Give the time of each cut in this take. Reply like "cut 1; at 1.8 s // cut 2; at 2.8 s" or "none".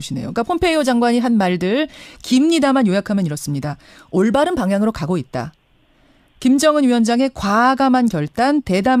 none